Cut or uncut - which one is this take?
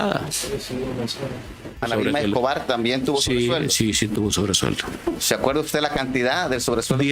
cut